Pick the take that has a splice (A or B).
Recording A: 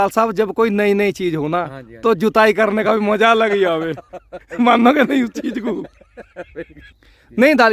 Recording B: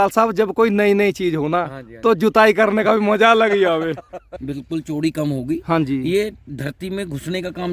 B